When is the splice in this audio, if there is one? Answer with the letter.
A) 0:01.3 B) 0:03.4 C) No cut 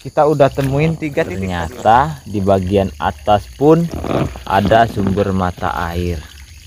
A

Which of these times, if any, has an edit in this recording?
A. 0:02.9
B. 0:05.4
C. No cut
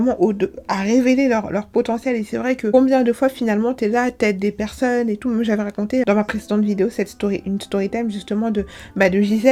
C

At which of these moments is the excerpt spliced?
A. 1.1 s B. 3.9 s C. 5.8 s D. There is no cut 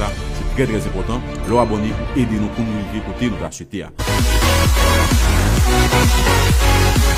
D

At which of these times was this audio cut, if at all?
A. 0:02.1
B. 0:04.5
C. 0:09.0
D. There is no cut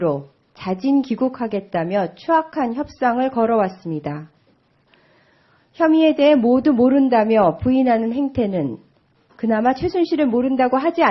A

